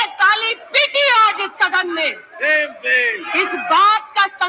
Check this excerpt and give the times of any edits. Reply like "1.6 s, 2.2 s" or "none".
none